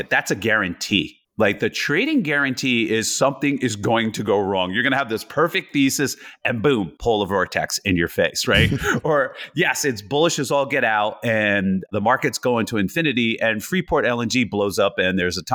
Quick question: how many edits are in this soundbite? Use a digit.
2